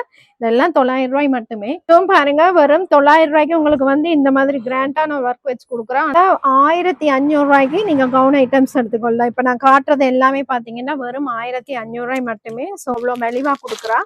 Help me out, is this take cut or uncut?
cut